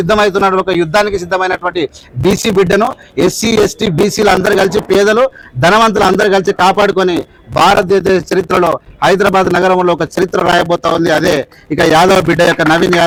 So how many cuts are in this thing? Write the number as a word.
zero